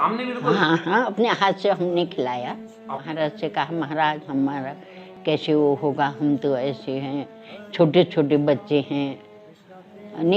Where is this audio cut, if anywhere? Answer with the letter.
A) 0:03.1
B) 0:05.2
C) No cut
A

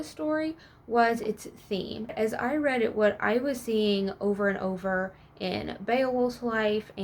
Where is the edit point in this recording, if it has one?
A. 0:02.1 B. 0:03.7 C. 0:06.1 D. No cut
A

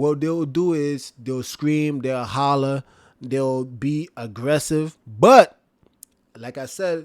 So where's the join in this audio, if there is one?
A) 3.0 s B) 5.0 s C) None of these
B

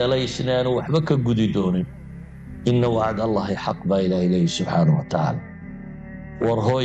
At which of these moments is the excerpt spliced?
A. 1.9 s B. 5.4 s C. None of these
A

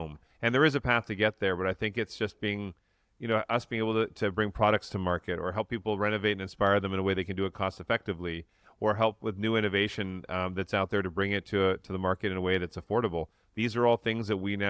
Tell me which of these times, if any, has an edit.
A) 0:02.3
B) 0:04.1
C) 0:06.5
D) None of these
D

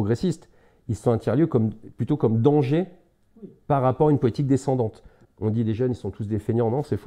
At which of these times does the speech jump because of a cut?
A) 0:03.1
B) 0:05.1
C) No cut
B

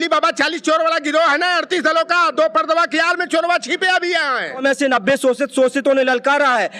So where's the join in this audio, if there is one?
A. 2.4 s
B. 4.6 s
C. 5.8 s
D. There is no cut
B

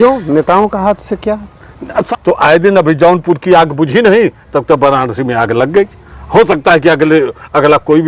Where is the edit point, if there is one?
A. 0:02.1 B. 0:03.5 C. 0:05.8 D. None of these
A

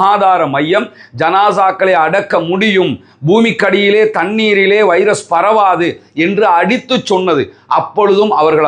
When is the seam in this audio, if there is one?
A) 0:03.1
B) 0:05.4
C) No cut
C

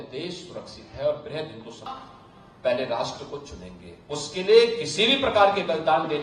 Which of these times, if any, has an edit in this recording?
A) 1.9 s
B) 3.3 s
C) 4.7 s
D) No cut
A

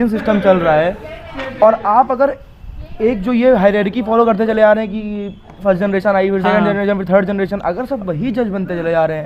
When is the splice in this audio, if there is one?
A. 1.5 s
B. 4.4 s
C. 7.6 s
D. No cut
D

